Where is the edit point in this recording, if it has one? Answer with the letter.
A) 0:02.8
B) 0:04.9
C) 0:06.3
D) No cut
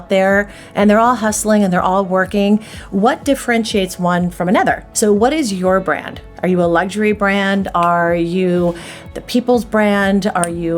B